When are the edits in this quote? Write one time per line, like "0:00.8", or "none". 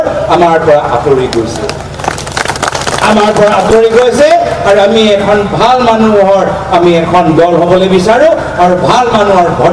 none